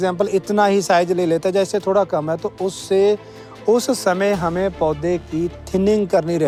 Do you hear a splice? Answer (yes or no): no